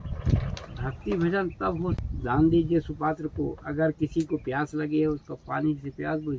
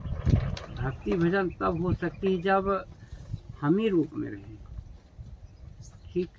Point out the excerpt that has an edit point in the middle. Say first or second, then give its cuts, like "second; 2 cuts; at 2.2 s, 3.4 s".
first; 1 cut; at 2.0 s